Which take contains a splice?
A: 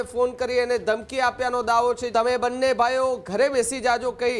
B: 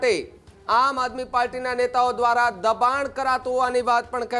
A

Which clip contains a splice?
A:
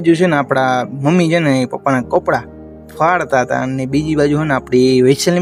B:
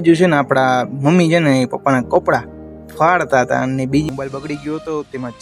B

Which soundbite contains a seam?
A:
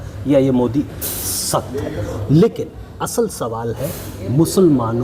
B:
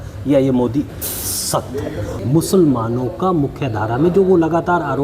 B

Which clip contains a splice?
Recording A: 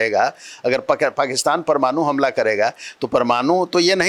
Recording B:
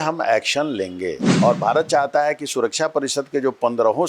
B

